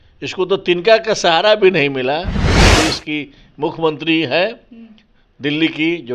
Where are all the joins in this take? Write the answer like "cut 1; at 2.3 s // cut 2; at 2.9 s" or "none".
cut 1; at 2.7 s